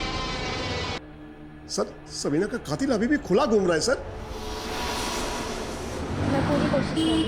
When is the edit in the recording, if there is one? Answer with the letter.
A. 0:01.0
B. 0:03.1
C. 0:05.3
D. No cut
A